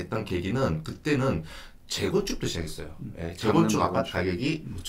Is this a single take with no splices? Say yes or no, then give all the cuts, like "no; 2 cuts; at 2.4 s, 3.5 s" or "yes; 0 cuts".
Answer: yes; 0 cuts